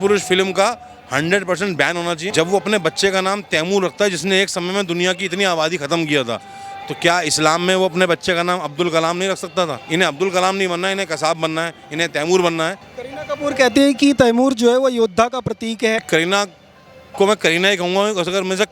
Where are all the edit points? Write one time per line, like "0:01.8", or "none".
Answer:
0:02.2
0:09.8
0:12.9